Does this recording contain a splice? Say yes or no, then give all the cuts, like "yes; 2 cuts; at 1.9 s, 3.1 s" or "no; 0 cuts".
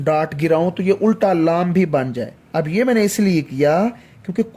no; 0 cuts